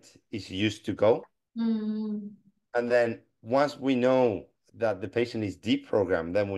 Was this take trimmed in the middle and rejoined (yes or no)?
yes